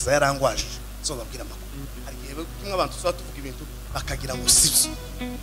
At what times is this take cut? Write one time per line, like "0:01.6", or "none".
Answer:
none